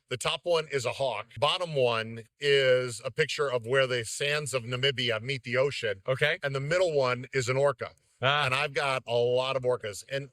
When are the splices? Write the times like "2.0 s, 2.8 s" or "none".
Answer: 1.4 s